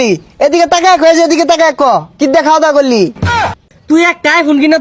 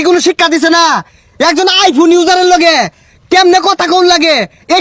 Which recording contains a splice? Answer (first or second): first